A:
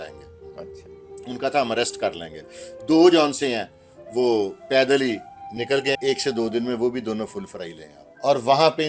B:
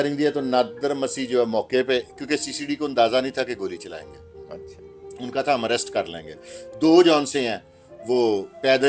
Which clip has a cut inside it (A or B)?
A